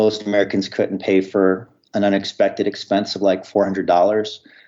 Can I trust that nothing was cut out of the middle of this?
yes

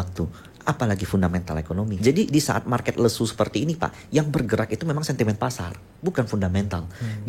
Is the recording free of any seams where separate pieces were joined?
no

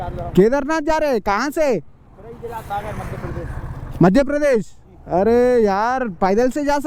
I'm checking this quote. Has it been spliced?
no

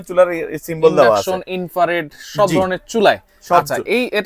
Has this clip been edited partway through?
no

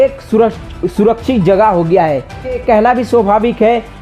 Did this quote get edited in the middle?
yes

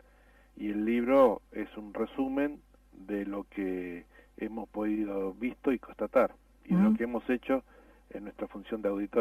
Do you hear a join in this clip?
no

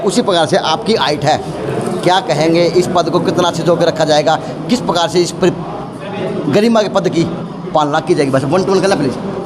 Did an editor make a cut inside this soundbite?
no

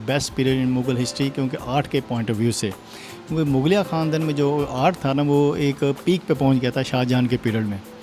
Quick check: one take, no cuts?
yes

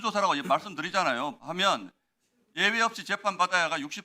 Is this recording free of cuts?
yes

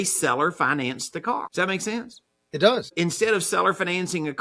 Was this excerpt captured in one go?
no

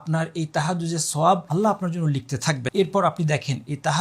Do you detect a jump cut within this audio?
yes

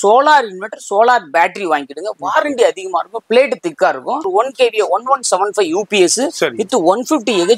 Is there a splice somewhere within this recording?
yes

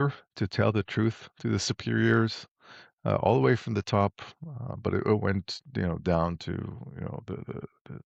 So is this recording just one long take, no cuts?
yes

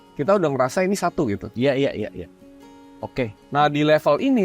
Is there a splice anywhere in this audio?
no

